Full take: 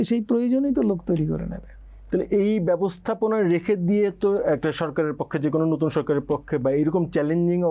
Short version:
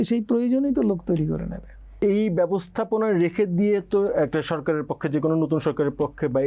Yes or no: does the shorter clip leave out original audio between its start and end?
yes